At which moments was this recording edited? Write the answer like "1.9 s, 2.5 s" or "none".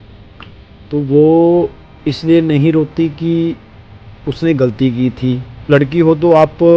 5.7 s